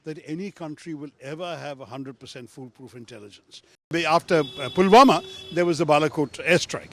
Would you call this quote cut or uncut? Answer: cut